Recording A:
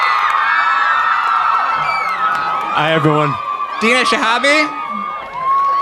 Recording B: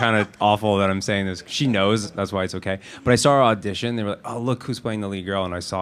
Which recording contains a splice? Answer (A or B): B